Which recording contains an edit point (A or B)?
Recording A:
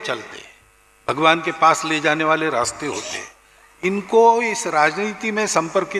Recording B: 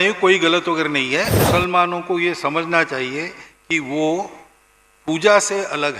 B